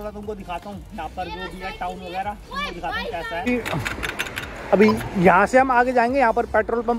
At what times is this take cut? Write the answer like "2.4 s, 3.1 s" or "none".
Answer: 3.4 s